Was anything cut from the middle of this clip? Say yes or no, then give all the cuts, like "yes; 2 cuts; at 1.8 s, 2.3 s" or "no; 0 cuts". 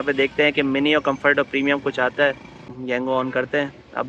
yes; 1 cut; at 2.7 s